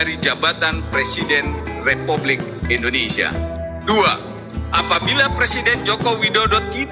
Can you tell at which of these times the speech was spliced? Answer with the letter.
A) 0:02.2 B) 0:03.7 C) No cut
B